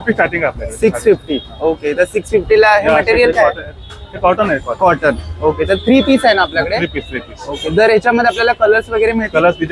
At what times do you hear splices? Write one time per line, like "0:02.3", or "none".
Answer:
none